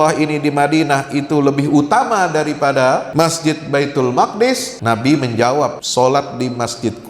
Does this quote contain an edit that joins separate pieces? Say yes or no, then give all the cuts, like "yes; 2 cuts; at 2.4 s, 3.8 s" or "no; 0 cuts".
yes; 3 cuts; at 3.1 s, 4.7 s, 5.8 s